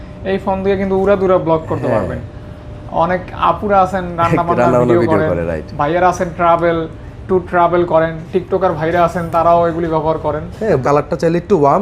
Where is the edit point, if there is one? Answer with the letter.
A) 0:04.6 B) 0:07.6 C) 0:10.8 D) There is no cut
C